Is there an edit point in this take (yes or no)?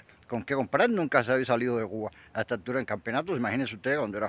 no